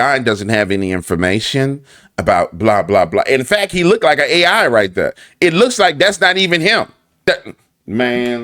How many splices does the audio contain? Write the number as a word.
one